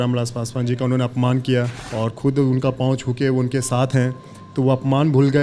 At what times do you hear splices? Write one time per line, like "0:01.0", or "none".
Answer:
0:01.8